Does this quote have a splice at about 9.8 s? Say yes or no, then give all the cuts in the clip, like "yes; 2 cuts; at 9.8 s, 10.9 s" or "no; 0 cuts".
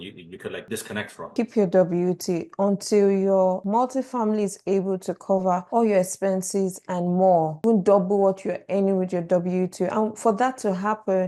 no; 2 cuts; at 1.2 s, 7.6 s